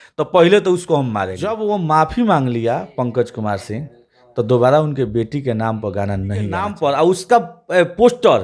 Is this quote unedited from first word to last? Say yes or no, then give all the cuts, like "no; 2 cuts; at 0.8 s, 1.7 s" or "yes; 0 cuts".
no; 2 cuts; at 1.6 s, 6.7 s